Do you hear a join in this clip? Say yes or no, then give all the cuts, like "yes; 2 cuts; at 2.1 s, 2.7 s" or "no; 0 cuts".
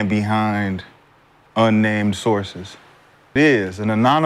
no; 0 cuts